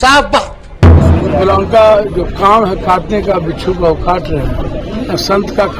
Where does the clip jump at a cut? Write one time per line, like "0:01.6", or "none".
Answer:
0:01.0
0:04.8